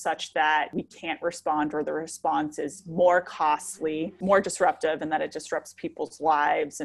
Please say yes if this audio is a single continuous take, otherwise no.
yes